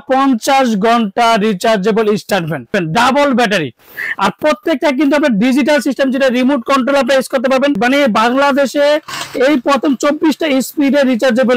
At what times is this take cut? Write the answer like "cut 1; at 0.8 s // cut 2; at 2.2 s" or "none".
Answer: cut 1; at 2.7 s // cut 2; at 7.8 s